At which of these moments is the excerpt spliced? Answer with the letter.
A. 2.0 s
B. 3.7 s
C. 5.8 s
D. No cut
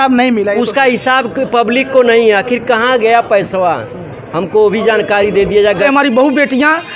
C